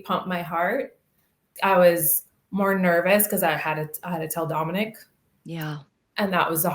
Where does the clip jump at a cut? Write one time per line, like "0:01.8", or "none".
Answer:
0:01.5